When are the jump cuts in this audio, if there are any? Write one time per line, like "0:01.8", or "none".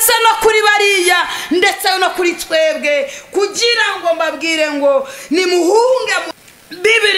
0:06.2

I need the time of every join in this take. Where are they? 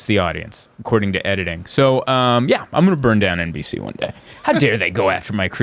none

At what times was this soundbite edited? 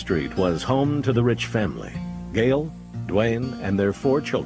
0:03.1

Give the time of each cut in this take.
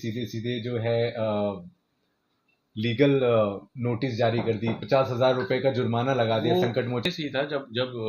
0:07.0

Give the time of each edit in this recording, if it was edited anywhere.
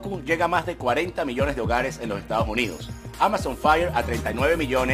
none

